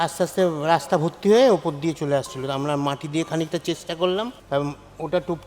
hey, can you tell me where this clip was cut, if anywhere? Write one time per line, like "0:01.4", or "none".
0:04.4